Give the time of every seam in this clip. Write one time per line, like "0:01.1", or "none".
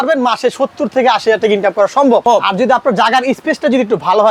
0:02.2